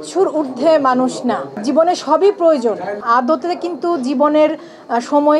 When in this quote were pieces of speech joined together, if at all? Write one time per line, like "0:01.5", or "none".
0:01.6
0:03.0